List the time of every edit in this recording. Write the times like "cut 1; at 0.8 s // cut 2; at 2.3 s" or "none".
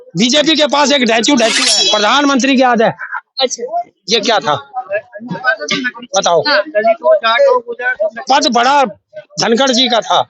cut 1; at 1.5 s